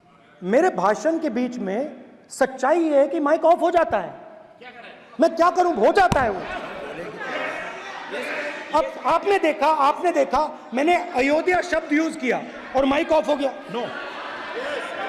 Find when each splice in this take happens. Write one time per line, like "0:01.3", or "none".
none